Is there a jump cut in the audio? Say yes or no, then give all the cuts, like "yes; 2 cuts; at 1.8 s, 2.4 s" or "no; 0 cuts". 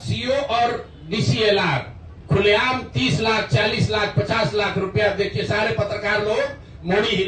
yes; 1 cut; at 2.1 s